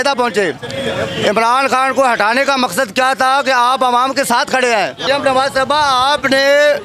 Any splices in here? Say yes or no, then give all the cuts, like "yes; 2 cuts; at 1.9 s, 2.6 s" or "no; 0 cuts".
yes; 1 cut; at 5.1 s